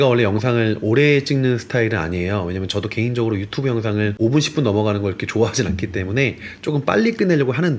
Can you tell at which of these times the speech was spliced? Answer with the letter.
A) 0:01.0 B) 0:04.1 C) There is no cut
B